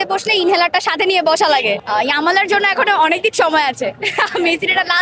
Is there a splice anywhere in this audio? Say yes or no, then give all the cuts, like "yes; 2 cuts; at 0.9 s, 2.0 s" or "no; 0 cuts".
yes; 1 cut; at 1.8 s